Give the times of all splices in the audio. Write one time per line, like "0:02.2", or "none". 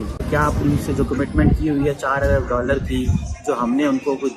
none